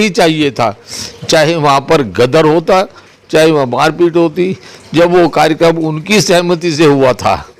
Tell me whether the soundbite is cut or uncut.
uncut